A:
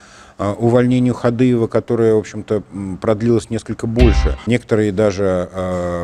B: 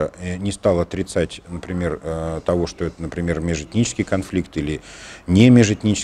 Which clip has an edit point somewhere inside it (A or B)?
A